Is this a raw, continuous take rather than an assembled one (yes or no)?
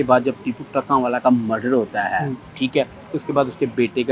yes